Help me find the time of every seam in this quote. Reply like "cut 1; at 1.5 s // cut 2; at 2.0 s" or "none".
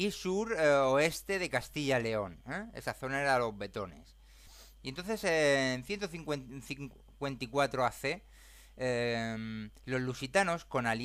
none